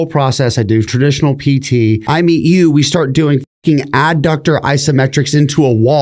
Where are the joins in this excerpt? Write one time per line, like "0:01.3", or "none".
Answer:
0:00.9
0:02.0